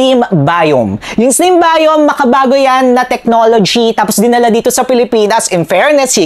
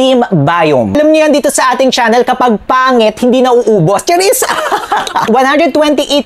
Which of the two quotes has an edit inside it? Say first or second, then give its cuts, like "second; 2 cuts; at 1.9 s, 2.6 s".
second; 2 cuts; at 0.9 s, 5.3 s